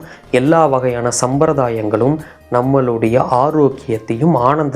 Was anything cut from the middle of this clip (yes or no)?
no